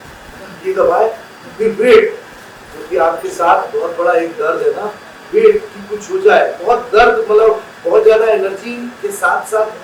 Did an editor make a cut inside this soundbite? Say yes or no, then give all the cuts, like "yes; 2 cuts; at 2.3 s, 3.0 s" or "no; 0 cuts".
no; 0 cuts